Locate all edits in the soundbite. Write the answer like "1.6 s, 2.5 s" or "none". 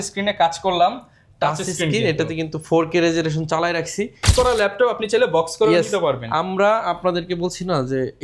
4.3 s

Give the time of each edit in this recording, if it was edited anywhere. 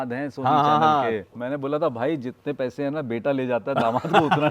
1.3 s

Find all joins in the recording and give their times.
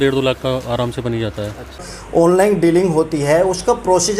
1.9 s

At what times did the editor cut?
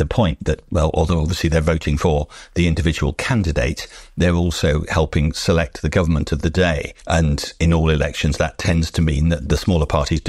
7.3 s, 9.4 s

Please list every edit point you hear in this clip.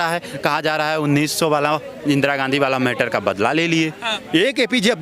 4.1 s

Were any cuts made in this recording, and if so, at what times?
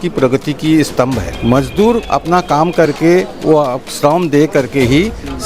1.3 s

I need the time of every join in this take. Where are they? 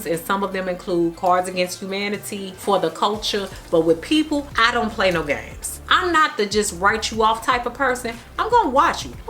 none

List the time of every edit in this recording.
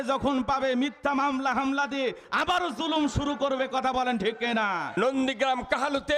4.9 s

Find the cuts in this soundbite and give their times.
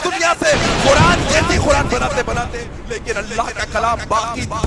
2.6 s

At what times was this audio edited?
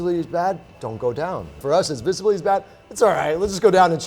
1.6 s

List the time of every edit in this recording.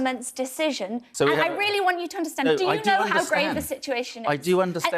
1.0 s

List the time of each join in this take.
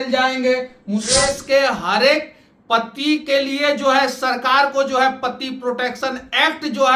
1.1 s

